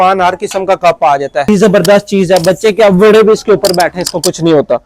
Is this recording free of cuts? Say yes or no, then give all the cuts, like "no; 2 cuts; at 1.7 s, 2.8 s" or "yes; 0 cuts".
no; 1 cut; at 1.5 s